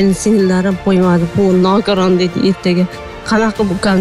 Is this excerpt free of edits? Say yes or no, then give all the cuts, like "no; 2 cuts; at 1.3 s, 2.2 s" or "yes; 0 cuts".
yes; 0 cuts